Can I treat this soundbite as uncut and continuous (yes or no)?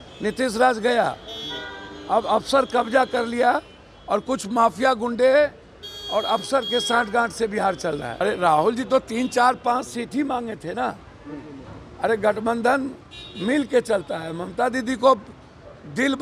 no